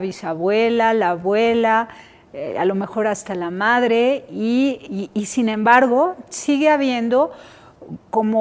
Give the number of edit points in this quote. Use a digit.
1